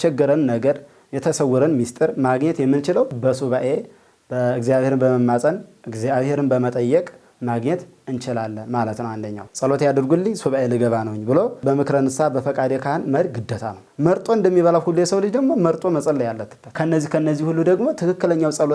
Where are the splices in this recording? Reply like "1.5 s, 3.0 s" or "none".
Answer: 9.4 s, 13.8 s, 16.6 s

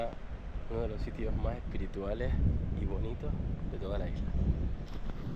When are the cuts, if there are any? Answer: none

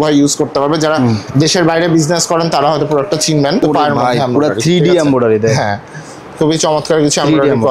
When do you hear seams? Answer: 3.6 s

